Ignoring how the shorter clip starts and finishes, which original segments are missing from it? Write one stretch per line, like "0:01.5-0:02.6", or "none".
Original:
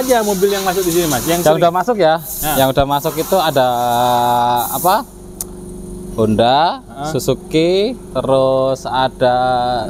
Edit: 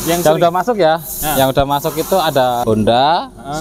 0:03.8-0:06.1